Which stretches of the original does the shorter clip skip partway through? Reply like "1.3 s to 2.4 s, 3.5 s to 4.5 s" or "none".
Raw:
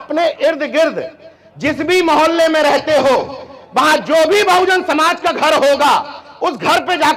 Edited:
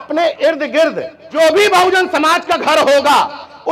1.3 s to 4.1 s